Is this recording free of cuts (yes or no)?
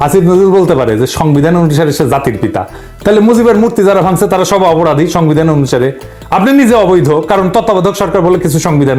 yes